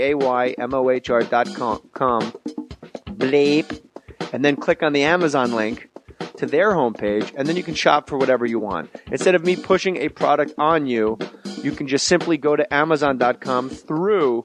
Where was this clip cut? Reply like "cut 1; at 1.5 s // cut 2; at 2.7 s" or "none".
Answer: cut 1; at 4.6 s